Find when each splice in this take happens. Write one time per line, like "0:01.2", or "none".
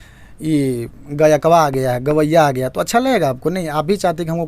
none